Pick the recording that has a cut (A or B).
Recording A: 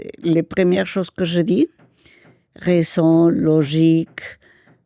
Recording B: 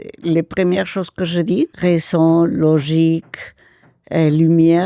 B